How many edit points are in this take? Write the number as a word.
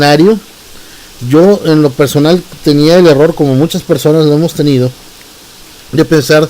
one